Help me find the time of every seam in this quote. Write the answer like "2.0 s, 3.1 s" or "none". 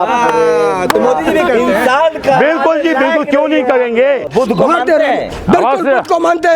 4.3 s